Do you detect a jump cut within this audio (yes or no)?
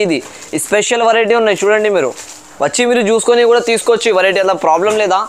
yes